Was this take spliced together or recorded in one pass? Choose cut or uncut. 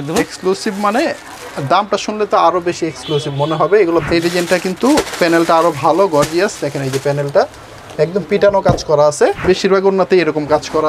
cut